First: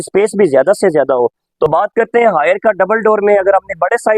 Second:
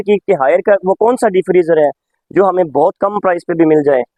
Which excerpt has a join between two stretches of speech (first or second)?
first